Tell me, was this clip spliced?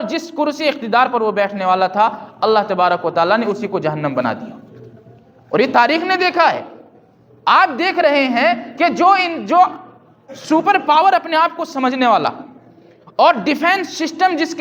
no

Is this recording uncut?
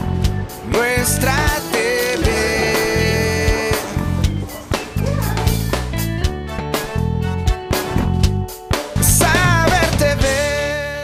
yes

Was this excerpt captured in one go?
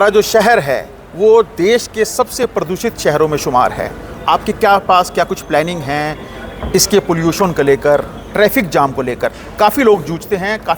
yes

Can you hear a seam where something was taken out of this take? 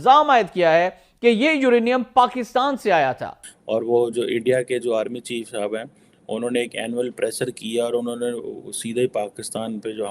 yes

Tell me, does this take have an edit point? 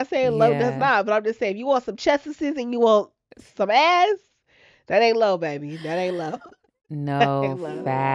no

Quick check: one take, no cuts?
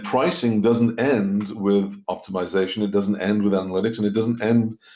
yes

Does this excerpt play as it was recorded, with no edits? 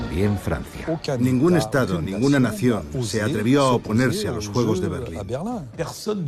no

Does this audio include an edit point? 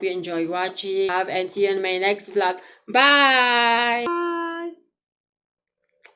yes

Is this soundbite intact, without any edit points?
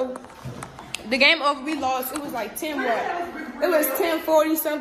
yes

